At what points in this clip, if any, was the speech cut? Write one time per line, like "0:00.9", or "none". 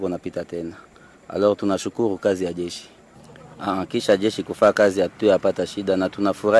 none